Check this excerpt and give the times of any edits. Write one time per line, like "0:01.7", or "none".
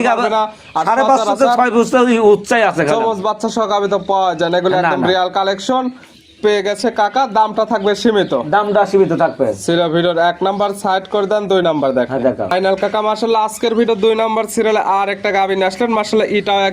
none